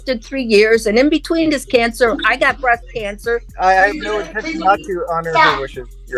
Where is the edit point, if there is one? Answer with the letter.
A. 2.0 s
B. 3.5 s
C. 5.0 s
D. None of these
B